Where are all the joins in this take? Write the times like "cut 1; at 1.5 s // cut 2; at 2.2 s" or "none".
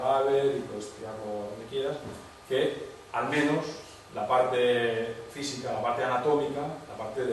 none